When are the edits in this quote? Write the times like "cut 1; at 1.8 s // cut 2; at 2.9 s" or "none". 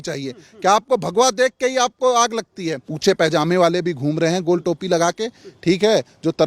cut 1; at 2.9 s